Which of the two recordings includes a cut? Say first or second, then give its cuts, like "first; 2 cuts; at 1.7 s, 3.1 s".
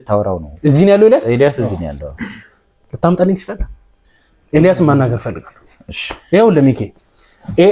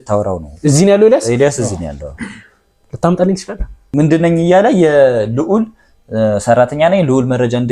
second; 1 cut; at 3.7 s